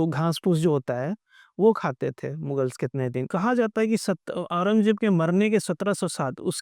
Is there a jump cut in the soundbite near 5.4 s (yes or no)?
no